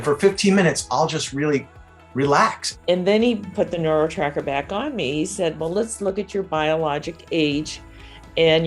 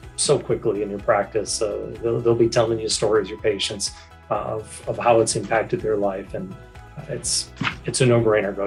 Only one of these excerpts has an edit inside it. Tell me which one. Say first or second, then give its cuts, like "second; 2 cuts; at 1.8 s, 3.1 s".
first; 1 cut; at 2.7 s